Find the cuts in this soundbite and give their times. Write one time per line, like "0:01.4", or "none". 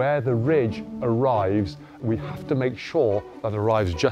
none